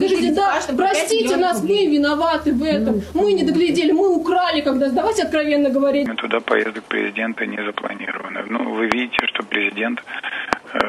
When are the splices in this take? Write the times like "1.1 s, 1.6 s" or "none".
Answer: 6.1 s